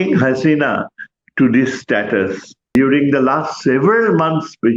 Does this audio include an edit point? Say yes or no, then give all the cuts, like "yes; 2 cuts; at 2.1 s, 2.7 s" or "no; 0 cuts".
yes; 1 cut; at 2.7 s